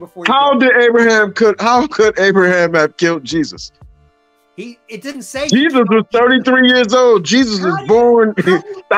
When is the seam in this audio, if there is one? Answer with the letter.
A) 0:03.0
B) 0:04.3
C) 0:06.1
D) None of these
D